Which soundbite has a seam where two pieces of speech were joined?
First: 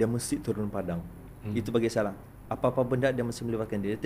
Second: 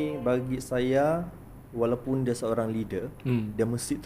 first; 1 cut; at 2.3 s

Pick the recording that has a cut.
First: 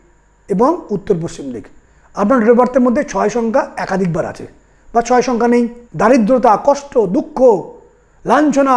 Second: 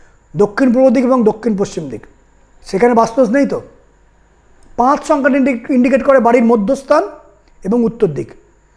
first; 1 cut; at 5.9 s

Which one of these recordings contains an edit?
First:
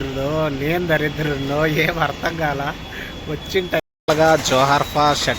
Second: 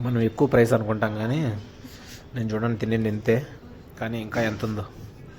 first; 1 cut; at 3.8 s

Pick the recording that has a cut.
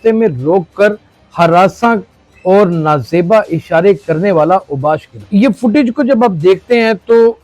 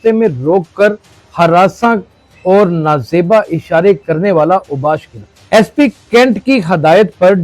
first; 1 cut; at 5.2 s

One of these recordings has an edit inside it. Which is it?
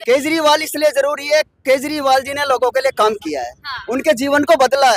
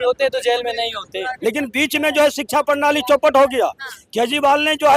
second; 1 cut; at 1.2 s

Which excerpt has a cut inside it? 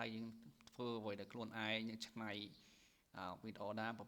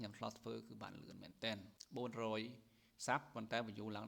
second; 1 cut; at 1.7 s

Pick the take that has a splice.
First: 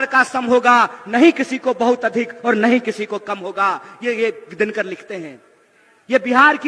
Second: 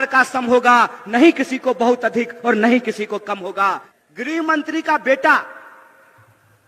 second; 1 cut; at 3.9 s

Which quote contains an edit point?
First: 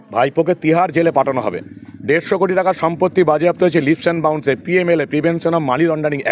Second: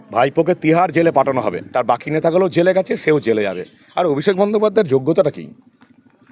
second; 1 cut; at 1.6 s

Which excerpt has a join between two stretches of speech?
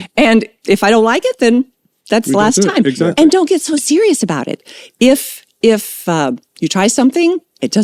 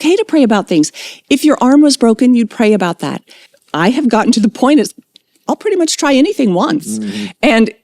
second; 1 cut; at 3.4 s

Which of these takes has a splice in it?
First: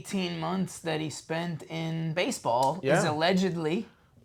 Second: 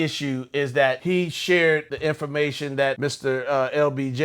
second; 3 cuts; at 1.0 s, 1.9 s, 3.0 s

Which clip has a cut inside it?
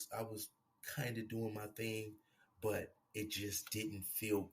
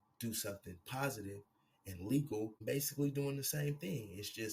second; 1 cut; at 2.6 s

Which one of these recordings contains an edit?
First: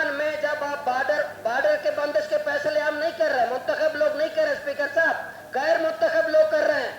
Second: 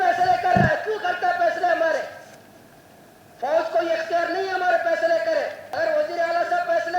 second; 1 cut; at 5.6 s

